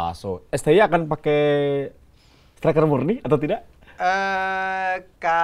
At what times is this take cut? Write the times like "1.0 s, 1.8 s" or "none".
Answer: none